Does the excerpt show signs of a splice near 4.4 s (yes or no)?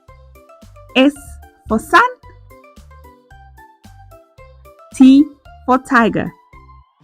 yes